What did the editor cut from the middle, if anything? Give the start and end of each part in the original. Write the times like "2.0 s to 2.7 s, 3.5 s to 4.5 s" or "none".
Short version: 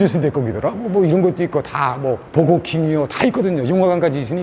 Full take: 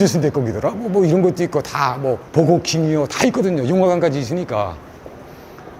none

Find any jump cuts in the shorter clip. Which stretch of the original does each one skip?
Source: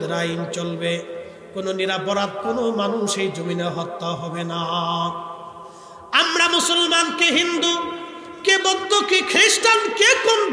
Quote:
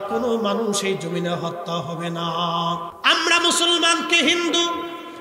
5.3 s to 6.0 s

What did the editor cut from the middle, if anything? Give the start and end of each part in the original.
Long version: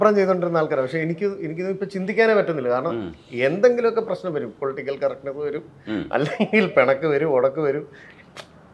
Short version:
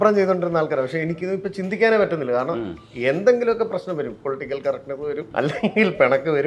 1.1 s to 1.5 s, 5.7 s to 6.1 s

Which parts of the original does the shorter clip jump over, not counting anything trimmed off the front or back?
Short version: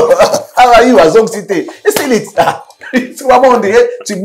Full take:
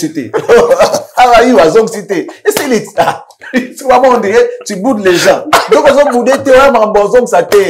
none

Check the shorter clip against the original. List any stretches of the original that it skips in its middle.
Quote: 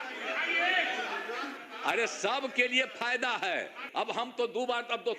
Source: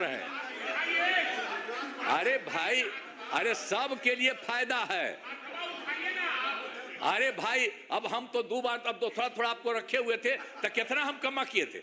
1.9 s to 3.0 s, 5.3 s to 7.8 s

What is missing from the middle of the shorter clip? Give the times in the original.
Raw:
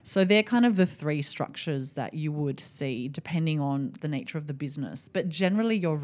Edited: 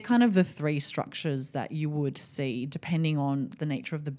none

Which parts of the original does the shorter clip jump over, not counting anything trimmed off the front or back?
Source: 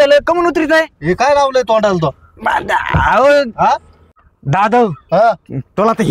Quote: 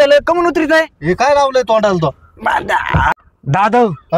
3.1 s to 4.1 s

